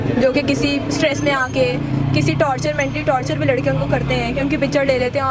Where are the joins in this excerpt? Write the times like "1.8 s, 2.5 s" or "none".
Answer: none

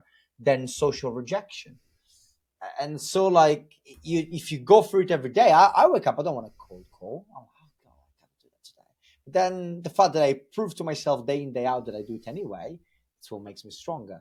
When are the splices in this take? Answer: none

